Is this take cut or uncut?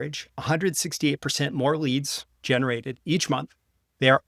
uncut